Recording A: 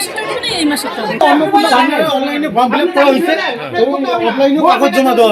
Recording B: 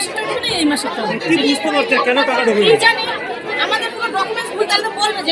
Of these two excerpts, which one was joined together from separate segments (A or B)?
A